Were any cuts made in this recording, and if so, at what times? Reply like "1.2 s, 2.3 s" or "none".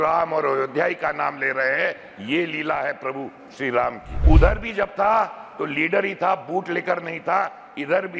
4.1 s